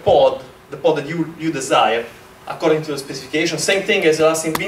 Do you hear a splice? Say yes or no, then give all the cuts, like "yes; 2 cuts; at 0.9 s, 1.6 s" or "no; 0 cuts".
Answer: no; 0 cuts